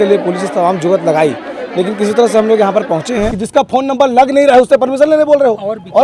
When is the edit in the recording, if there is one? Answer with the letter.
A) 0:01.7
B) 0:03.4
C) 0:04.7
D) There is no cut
B